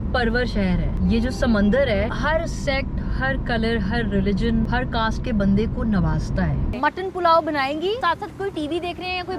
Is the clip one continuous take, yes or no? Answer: no